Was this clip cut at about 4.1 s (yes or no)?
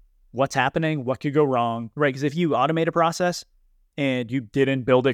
no